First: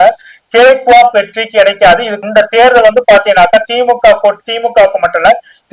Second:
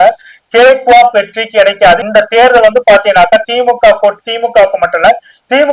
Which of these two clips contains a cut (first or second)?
second